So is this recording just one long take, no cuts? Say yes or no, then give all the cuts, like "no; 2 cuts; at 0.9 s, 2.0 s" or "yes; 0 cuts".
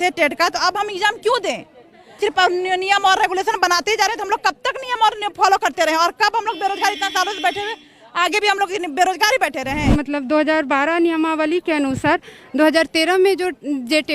no; 2 cuts; at 2.2 s, 9.8 s